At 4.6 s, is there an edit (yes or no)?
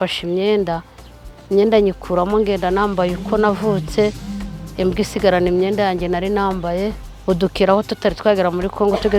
no